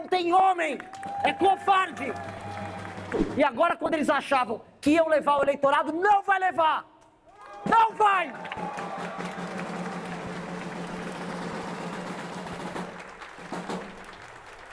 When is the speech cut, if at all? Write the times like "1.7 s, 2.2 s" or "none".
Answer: 3.2 s